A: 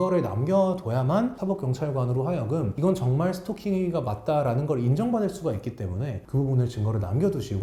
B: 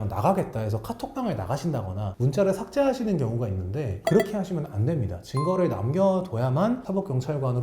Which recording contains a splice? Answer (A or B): B